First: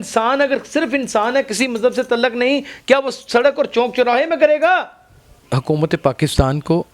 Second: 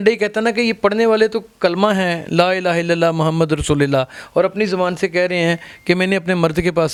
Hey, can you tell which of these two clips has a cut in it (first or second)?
first